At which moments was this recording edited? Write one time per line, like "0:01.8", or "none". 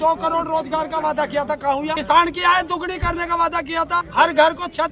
0:02.0
0:04.1